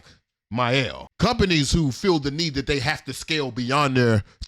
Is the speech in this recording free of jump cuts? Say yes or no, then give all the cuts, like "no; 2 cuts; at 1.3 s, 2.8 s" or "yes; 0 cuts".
no; 1 cut; at 1.0 s